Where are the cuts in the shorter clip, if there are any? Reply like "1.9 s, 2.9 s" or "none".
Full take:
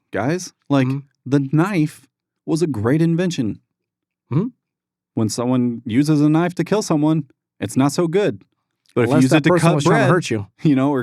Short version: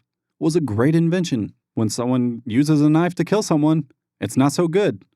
1.6 s